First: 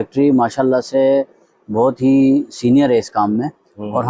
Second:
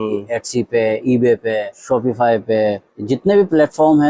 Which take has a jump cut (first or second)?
second